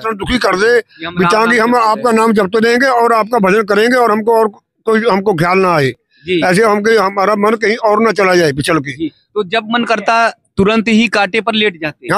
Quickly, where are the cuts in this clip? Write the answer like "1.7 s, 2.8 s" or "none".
none